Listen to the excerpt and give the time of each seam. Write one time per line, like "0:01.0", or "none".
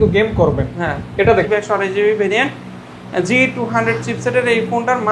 0:01.5